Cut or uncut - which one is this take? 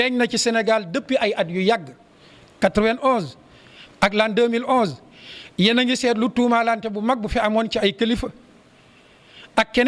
uncut